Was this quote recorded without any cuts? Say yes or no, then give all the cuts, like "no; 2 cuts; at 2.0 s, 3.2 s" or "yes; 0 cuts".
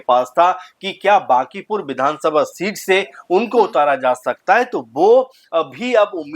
yes; 0 cuts